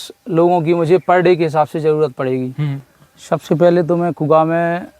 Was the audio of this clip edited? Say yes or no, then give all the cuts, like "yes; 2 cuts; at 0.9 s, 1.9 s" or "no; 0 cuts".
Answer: yes; 1 cut; at 2.7 s